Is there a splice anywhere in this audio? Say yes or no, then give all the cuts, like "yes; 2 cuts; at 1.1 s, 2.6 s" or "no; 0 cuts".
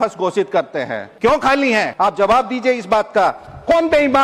yes; 2 cuts; at 1.0 s, 1.9 s